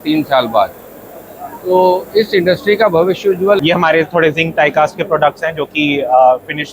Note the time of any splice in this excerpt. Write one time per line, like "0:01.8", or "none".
0:03.6